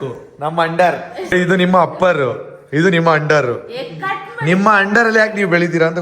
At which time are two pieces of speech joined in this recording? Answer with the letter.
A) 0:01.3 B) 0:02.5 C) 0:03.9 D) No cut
A